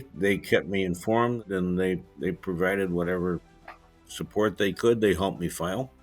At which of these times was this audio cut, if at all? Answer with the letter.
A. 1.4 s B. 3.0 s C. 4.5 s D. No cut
A